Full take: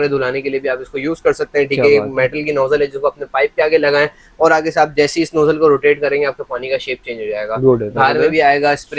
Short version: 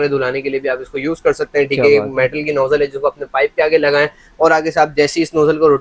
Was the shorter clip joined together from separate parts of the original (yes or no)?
no